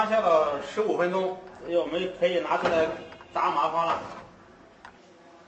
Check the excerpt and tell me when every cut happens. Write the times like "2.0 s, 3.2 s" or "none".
none